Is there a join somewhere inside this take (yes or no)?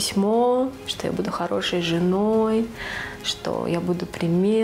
no